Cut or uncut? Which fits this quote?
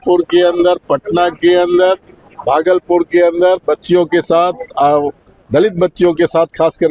uncut